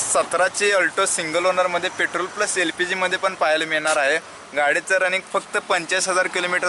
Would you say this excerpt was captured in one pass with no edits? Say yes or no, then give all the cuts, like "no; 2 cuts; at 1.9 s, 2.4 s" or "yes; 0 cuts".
yes; 0 cuts